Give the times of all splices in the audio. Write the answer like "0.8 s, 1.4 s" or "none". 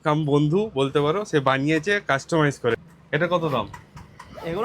2.8 s